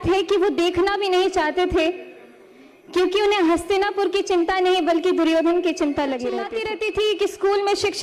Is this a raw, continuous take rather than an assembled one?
no; 1 cut; at 6.6 s

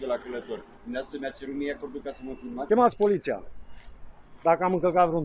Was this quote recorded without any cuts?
no; 2 cuts; at 0.8 s, 2.7 s

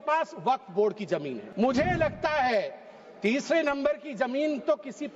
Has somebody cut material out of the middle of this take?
yes; 1 cut; at 1.4 s

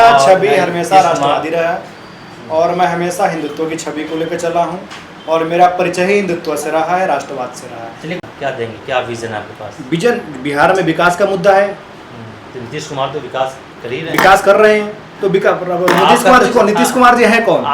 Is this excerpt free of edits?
no; 1 cut; at 8.2 s

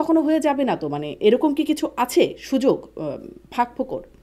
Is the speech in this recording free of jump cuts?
yes; 0 cuts

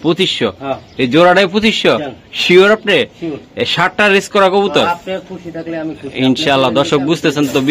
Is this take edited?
no; 0 cuts

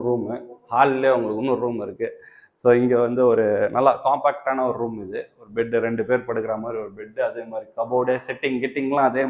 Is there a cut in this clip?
no; 0 cuts

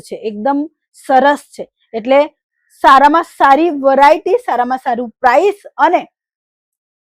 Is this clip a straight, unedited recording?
yes; 0 cuts

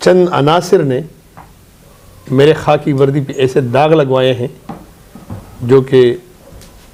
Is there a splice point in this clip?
no; 0 cuts

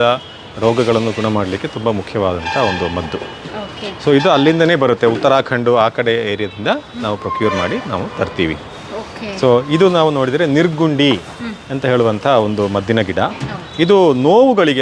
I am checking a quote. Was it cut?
no; 0 cuts

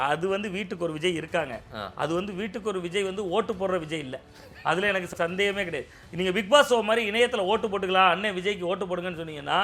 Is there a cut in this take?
yes; 1 cut; at 5.1 s

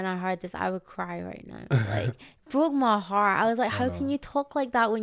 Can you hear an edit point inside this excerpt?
no; 0 cuts

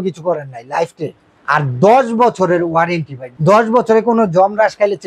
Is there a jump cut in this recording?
yes; 2 cuts; at 1.3 s, 3.2 s

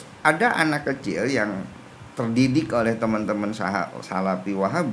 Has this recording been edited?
no; 0 cuts

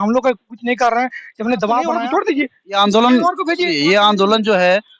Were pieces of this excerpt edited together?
yes; 1 cut; at 2.0 s

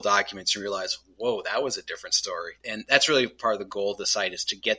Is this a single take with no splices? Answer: no; 1 cut; at 2.6 s

